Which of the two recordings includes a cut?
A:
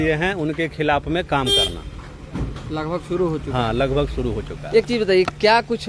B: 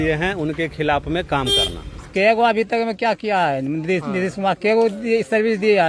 B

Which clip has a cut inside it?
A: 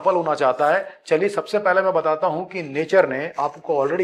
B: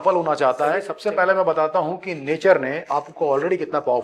B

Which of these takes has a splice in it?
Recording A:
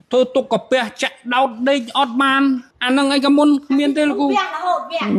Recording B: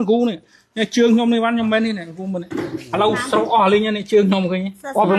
A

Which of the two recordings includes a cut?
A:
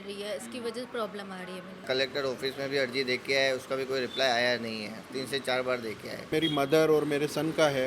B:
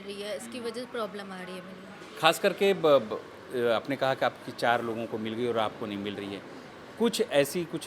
A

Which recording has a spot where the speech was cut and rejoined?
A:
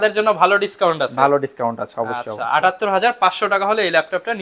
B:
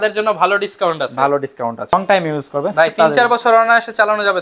B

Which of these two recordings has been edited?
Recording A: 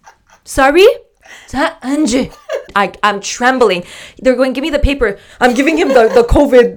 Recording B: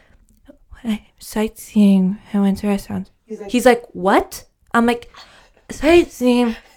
A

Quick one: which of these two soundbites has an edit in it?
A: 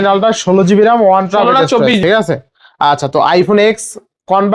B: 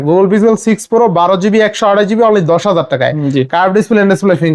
A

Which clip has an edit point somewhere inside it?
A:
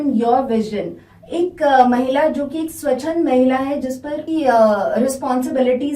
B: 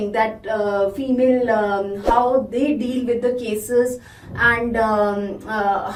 A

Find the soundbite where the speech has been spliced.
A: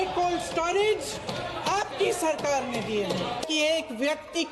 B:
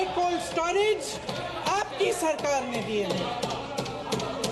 A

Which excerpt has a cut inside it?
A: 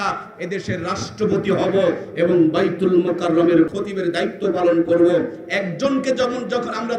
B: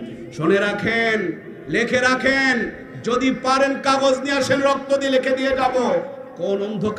A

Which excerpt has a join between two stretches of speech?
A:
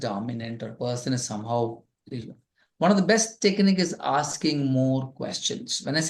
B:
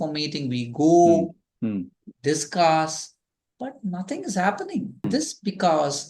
B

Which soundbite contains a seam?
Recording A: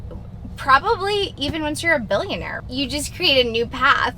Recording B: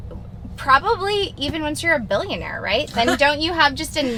A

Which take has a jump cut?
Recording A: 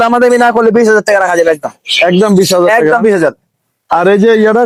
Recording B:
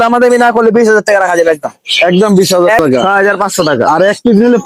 B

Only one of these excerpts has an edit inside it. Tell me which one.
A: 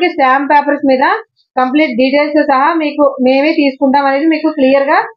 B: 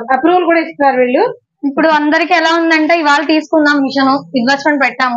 B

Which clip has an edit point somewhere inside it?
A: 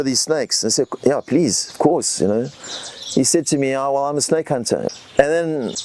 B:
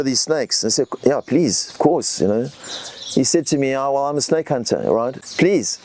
A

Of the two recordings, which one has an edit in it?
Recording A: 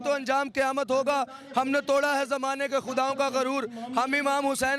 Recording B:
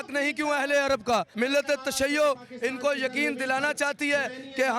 B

